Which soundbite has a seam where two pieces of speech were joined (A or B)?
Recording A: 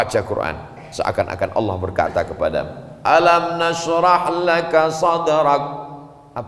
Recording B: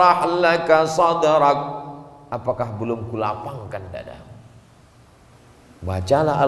B